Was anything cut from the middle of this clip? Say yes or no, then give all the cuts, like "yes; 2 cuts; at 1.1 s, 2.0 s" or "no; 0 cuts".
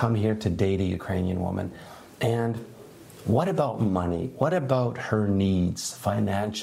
no; 0 cuts